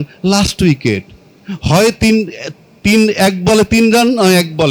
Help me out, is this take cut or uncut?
uncut